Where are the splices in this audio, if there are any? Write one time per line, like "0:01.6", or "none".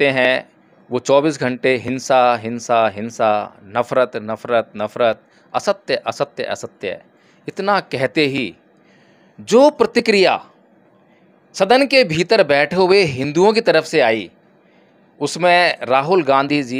none